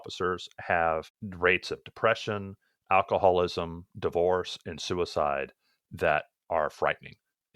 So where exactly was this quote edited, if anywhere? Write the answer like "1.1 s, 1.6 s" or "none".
1.2 s